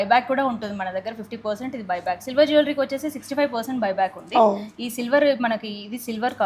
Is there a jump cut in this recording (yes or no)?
no